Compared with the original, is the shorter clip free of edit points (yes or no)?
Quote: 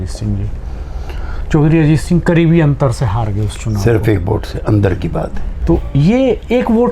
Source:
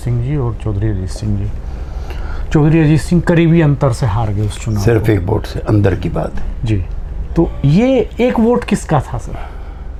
no